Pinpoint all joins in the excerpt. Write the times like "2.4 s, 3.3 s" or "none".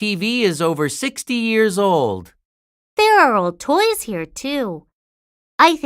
2.6 s